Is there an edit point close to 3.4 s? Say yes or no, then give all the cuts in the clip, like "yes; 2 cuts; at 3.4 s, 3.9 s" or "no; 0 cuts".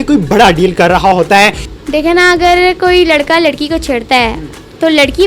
no; 1 cut; at 1.7 s